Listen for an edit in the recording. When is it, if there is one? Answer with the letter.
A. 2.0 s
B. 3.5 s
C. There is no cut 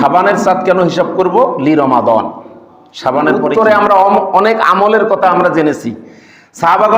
B